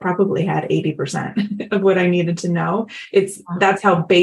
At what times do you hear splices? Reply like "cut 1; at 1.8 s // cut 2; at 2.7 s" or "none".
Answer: none